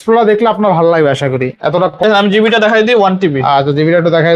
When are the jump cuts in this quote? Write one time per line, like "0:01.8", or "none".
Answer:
0:02.0